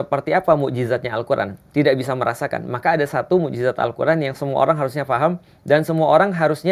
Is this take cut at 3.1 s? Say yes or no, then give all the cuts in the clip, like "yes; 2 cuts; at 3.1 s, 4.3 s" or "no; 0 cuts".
no; 0 cuts